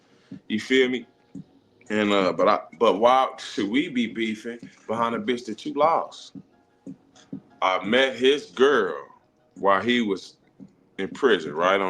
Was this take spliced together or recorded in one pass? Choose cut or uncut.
cut